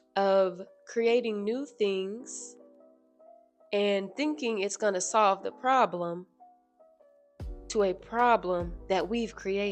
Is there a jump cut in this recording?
no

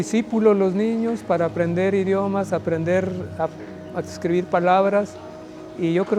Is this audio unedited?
yes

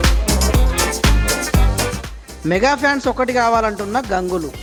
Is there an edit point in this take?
no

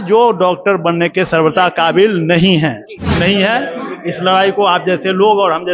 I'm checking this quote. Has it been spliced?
yes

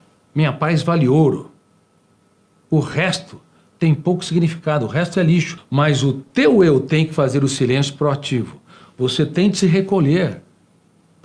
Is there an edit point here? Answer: yes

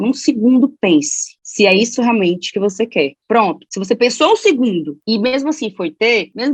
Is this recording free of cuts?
yes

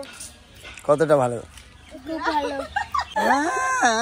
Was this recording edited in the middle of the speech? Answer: yes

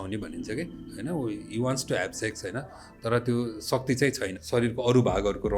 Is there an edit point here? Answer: yes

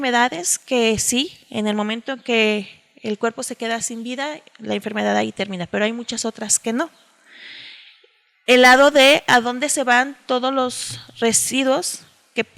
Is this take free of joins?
yes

